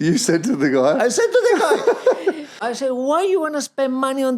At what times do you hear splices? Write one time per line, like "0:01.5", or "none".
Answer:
0:02.6